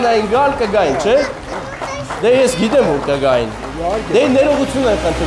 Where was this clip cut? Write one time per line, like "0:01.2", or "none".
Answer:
none